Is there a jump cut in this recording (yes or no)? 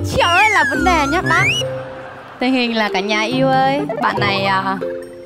no